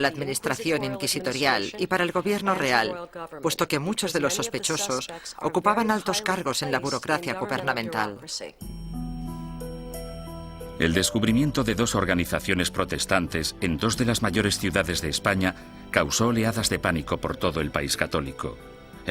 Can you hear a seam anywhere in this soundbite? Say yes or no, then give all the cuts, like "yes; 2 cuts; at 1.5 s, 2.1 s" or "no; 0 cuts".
no; 0 cuts